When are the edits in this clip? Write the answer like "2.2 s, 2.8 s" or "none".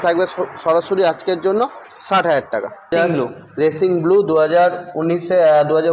2.9 s